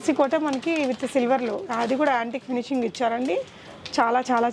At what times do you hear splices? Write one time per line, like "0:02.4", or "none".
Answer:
none